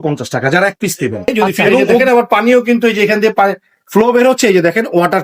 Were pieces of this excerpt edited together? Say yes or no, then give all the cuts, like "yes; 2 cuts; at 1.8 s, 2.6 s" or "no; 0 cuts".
yes; 1 cut; at 2.0 s